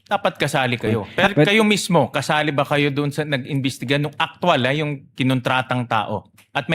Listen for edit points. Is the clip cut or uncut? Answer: cut